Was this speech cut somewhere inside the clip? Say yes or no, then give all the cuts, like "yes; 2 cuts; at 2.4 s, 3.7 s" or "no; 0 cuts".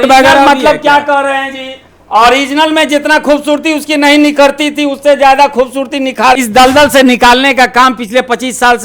yes; 1 cut; at 6.4 s